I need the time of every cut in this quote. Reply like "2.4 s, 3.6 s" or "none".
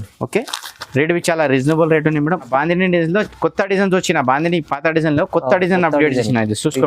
2.5 s